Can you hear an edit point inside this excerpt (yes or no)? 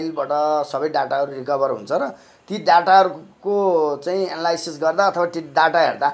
no